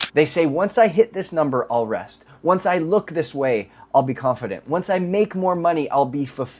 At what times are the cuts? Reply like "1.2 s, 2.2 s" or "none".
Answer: none